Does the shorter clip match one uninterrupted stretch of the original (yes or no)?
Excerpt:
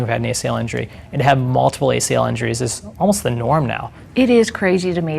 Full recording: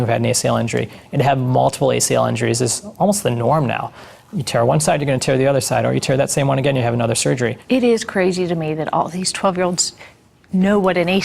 no